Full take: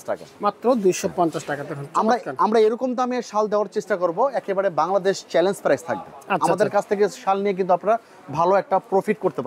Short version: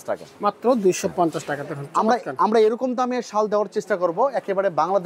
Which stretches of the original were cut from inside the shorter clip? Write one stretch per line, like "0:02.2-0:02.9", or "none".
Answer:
none